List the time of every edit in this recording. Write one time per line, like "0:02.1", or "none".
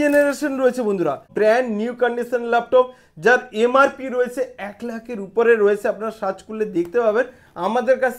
0:01.3